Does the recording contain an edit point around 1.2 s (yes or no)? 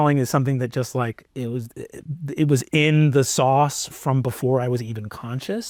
no